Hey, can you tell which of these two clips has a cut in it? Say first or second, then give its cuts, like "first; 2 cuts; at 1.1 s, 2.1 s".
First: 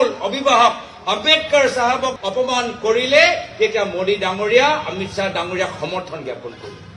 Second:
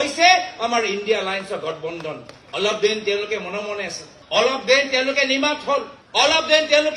second; 1 cut; at 2.3 s